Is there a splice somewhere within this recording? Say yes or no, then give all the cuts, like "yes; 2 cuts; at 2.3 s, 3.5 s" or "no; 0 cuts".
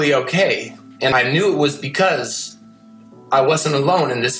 yes; 1 cut; at 1.1 s